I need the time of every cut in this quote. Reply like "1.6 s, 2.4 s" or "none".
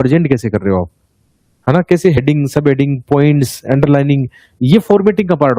none